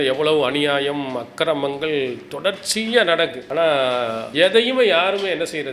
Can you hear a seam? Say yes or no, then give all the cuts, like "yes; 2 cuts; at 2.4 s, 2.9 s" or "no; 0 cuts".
yes; 2 cuts; at 3.4 s, 4.2 s